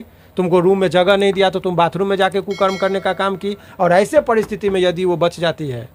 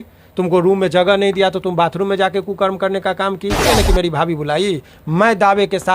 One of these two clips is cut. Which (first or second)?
second